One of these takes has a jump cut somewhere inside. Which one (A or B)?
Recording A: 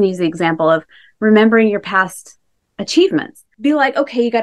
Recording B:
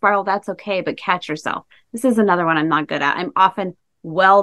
A